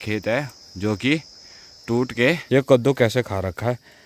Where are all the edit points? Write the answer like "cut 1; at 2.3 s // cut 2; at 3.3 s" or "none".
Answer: cut 1; at 2.4 s